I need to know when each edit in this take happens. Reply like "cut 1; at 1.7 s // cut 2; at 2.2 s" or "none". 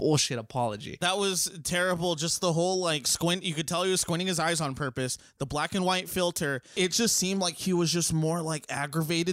cut 1; at 1.0 s // cut 2; at 6.7 s